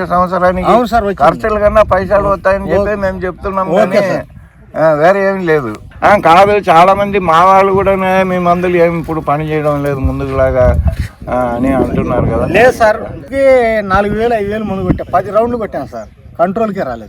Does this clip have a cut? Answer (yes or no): yes